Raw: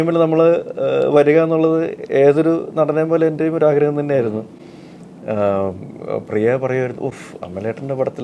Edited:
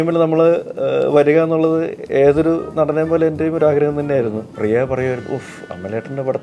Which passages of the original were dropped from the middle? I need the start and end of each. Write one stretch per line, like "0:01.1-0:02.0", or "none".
0:04.5-0:06.2